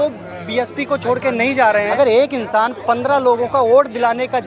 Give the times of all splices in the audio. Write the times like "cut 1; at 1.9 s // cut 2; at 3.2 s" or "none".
cut 1; at 1.9 s